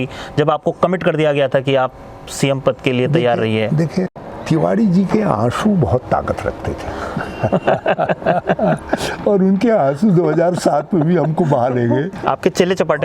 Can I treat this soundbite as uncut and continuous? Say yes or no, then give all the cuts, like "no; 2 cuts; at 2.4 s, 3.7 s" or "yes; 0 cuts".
no; 2 cuts; at 4.3 s, 12.1 s